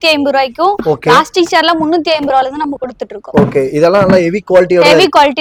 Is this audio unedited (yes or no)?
yes